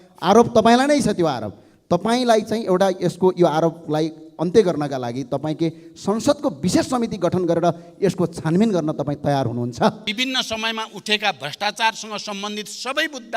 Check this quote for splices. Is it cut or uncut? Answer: cut